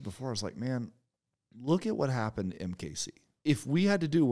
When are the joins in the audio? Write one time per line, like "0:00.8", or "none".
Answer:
0:03.3